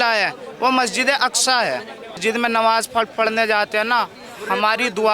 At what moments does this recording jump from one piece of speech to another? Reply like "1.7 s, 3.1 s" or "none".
2.2 s